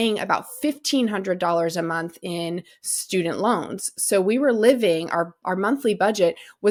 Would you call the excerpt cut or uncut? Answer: uncut